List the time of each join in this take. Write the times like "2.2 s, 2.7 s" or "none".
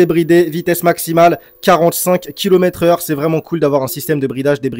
none